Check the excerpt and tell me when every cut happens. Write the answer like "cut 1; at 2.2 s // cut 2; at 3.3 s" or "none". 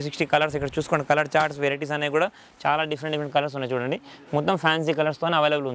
none